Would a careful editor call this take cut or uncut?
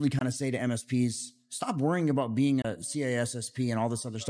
cut